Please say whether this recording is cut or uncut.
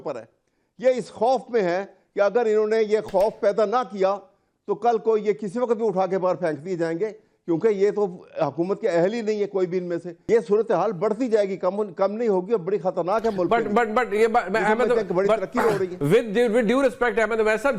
cut